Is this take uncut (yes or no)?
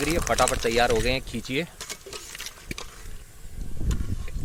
yes